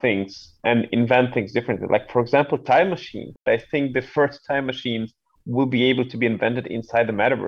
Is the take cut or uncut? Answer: cut